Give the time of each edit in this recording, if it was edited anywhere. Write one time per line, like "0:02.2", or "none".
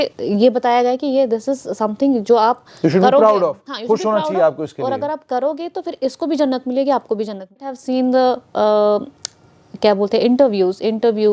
0:07.8

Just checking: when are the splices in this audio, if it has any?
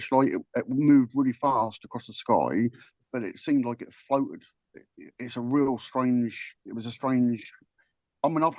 0:02.9

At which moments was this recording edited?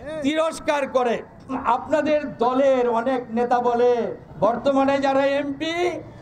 0:01.6
0:04.2

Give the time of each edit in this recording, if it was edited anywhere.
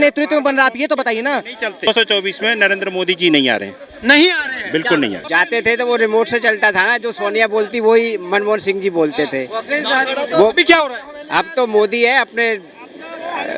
0:01.9
0:05.2

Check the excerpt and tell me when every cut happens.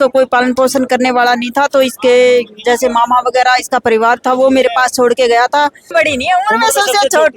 0:05.9

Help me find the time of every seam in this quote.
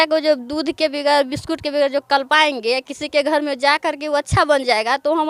none

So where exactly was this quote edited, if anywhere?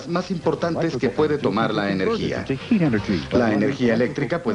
none

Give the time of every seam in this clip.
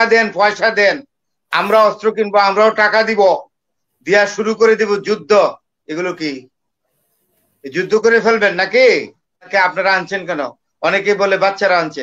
0:09.5

